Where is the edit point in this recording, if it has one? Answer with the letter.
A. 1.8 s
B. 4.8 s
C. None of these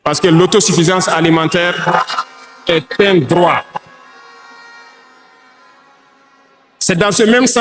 C